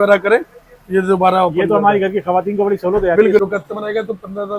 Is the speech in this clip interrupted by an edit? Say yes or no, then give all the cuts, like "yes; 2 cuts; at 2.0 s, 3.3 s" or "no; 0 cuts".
yes; 1 cut; at 3.4 s